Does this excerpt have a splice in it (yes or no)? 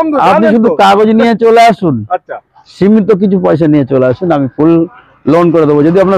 no